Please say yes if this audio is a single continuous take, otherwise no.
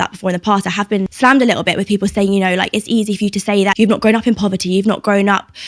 no